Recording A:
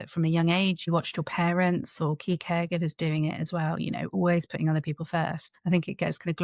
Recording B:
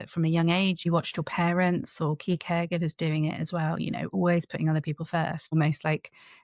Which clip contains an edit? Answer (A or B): B